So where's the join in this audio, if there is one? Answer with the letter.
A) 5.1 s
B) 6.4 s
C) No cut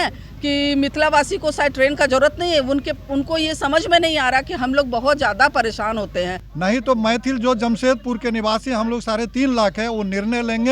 B